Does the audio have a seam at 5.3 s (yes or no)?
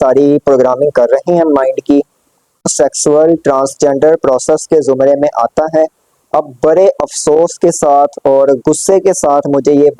no